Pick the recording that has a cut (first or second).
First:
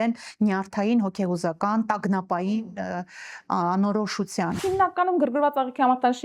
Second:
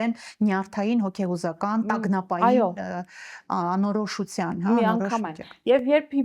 first